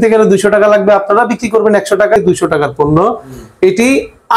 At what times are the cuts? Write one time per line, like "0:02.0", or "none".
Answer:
0:02.2